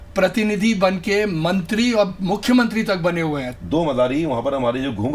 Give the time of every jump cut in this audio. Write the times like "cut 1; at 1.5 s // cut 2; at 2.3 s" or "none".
cut 1; at 3.5 s